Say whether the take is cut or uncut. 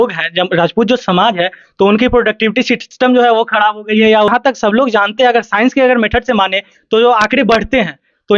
cut